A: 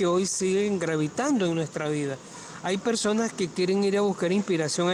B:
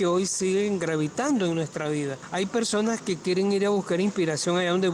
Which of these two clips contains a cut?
B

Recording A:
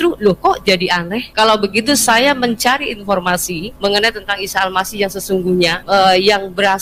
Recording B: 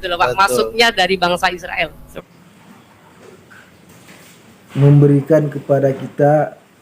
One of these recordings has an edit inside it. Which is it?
B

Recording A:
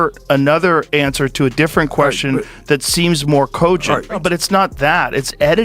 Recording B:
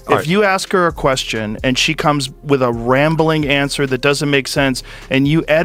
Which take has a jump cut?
A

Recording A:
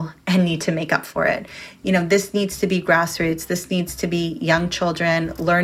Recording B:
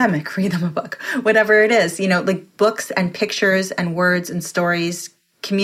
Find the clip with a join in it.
B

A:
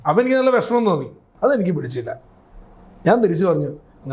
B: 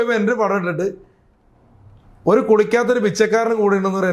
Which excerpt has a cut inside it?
A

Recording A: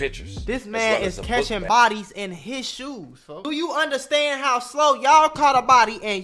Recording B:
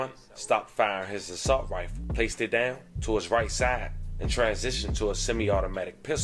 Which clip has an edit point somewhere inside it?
A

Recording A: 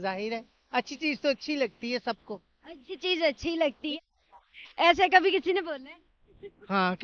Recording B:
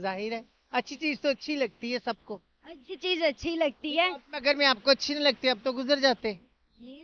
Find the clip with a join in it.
A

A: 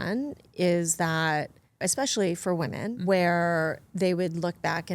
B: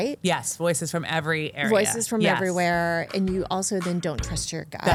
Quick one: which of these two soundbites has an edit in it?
A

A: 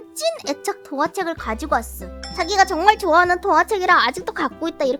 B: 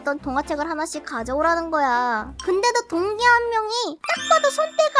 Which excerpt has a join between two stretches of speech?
B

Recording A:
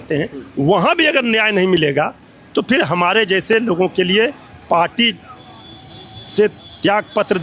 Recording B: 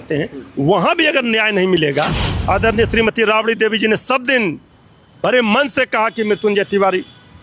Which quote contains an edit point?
B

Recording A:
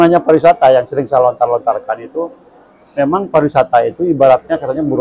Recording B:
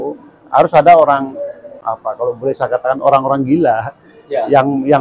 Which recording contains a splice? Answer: B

